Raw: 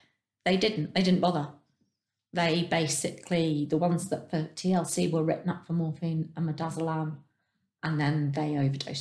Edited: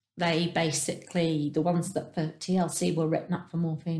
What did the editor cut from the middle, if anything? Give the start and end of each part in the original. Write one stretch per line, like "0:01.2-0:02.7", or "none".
none